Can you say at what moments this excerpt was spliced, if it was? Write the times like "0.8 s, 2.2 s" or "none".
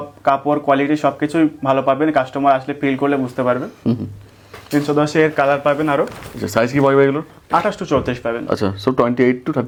none